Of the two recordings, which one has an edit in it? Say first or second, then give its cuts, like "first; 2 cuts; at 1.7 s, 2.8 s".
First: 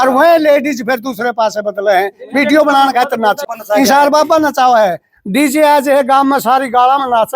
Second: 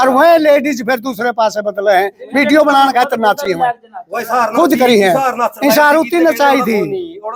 first; 1 cut; at 3.5 s